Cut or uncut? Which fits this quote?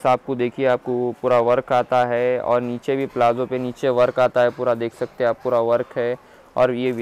uncut